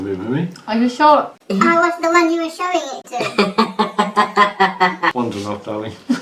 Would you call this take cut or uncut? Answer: cut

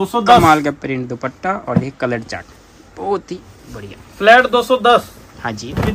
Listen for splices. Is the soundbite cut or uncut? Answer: uncut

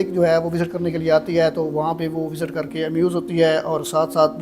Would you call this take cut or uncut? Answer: uncut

